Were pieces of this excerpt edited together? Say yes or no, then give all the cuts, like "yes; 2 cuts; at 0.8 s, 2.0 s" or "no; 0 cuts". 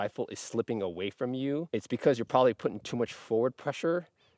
yes; 1 cut; at 1.7 s